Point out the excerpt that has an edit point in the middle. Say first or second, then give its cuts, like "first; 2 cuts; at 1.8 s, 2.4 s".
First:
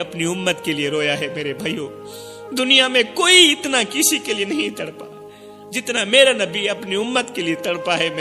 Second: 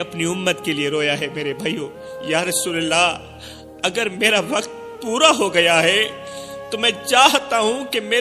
second; 1 cut; at 2.2 s